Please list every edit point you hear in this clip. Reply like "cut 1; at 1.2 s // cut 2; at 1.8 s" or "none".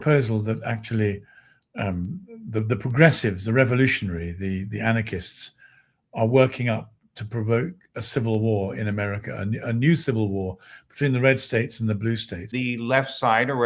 cut 1; at 12.5 s